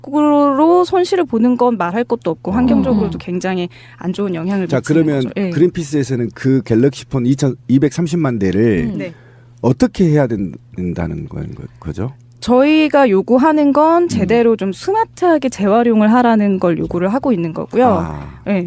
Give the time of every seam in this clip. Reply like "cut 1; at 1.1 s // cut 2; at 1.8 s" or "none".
none